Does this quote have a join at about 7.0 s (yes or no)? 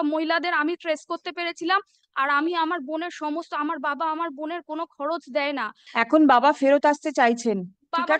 no